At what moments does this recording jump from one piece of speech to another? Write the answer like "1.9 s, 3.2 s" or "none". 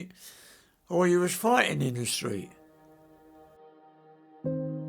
2.5 s